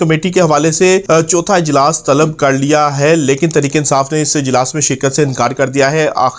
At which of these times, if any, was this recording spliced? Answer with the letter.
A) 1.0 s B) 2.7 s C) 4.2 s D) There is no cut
A